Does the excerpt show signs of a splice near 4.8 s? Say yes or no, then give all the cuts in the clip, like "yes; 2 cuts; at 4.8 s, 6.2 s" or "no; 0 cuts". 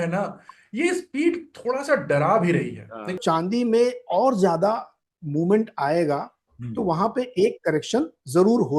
no; 1 cut; at 3.2 s